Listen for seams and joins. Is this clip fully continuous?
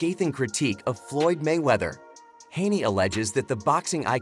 yes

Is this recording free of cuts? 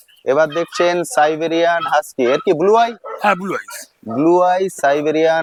yes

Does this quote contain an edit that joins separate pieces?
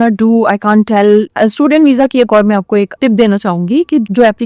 yes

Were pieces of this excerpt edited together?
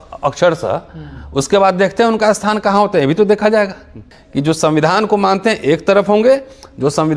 yes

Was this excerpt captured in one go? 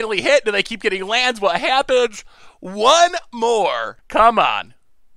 no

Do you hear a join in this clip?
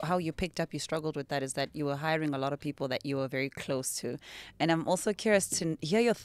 no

